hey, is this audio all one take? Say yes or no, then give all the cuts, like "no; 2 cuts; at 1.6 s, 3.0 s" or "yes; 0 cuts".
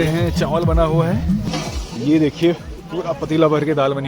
no; 1 cut; at 1.5 s